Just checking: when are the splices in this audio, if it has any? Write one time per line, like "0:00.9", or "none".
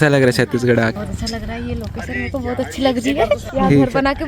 0:01.0
0:03.5